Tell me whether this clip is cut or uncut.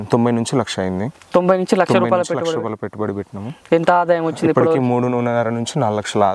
uncut